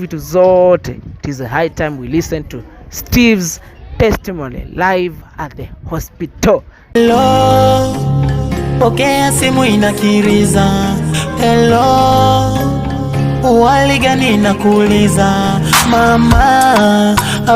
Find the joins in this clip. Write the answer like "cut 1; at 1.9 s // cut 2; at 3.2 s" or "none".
cut 1; at 6.9 s

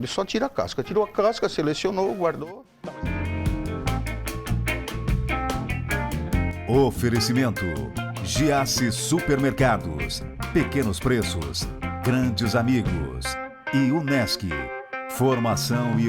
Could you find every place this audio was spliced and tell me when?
cut 1; at 2.6 s

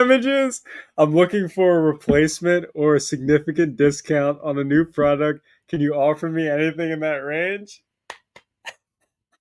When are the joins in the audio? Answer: none

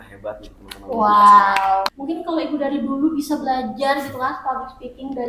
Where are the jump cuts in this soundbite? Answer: cut 1; at 1.8 s

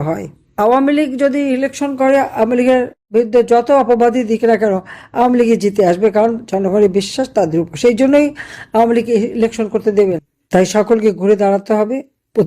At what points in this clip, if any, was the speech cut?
cut 1; at 10.3 s

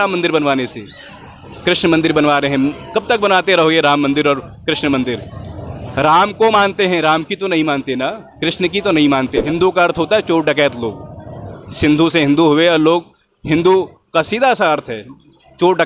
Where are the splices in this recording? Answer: cut 1; at 9.4 s

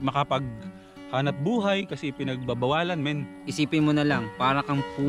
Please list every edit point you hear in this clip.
cut 1; at 3.4 s

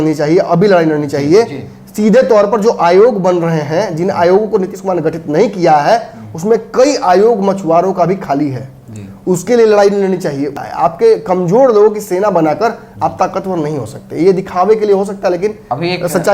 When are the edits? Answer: cut 1; at 10.6 s

